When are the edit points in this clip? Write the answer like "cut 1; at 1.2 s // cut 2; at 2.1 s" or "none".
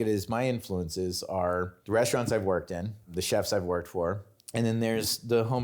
cut 1; at 1.8 s // cut 2; at 3.1 s // cut 3; at 4.3 s